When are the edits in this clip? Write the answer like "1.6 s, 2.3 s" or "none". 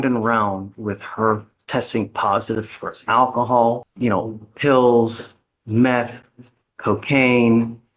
3.9 s